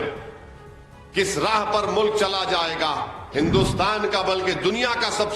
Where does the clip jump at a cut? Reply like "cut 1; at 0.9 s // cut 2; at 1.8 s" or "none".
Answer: cut 1; at 3.2 s